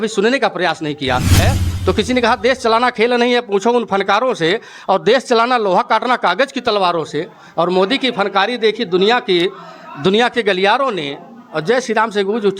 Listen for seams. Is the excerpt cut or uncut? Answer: cut